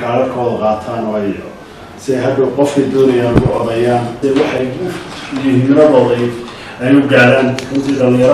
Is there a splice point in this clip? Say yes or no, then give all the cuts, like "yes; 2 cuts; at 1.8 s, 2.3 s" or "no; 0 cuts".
yes; 1 cut; at 4.2 s